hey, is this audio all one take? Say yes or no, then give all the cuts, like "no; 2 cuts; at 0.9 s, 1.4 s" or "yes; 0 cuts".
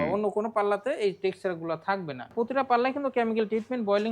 no; 1 cut; at 2.3 s